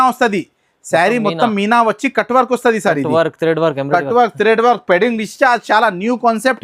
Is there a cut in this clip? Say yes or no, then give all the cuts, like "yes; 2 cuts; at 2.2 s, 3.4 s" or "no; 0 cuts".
no; 0 cuts